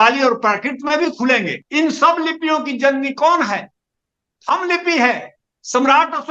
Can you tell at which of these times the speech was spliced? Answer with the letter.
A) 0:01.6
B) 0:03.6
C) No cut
A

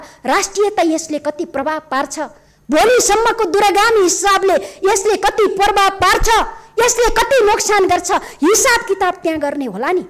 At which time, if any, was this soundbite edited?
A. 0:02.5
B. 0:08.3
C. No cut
C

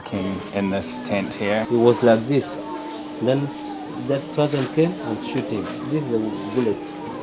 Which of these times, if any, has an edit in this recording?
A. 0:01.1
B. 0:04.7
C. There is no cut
C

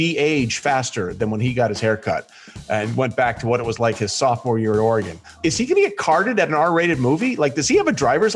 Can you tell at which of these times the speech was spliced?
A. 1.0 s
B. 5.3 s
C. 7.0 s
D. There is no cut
B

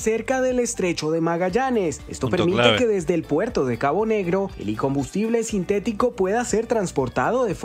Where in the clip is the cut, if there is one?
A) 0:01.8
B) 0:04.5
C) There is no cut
C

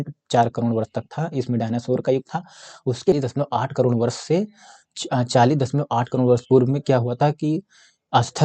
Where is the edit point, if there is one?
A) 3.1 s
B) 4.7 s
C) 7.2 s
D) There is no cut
A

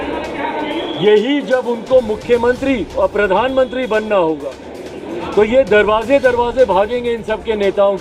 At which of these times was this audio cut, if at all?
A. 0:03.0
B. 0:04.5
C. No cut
C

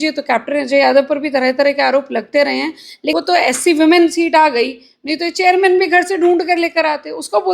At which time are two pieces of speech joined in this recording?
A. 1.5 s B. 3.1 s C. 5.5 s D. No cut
B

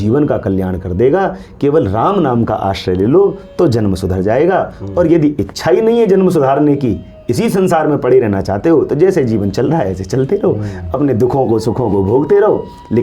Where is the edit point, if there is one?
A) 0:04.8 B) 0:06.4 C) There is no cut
C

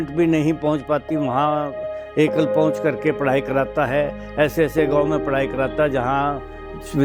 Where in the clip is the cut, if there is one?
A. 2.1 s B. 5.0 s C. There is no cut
C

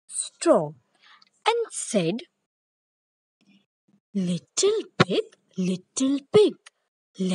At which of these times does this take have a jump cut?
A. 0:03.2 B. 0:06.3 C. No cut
A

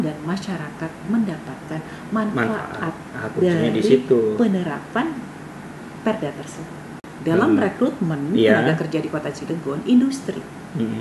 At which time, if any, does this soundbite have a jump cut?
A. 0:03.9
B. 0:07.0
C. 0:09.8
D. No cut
B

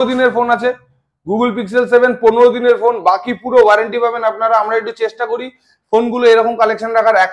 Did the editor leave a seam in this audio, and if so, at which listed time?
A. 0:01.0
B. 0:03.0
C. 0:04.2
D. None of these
D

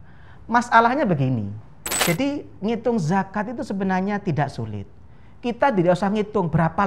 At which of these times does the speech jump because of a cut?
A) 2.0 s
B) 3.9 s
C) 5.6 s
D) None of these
A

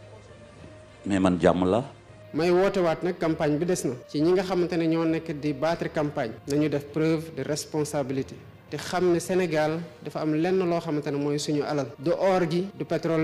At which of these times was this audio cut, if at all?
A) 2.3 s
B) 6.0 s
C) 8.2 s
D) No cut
A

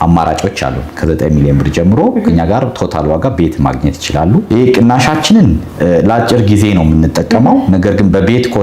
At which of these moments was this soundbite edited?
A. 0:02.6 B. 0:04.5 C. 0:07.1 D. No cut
B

